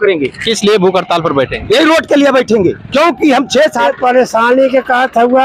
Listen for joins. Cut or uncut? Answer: cut